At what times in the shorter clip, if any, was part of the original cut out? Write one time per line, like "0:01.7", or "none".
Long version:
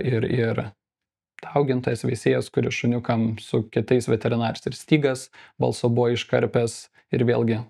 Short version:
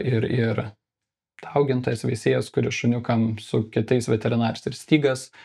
none